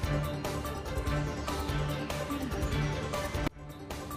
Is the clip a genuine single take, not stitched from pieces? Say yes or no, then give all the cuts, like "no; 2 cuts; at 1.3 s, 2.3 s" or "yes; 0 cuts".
yes; 0 cuts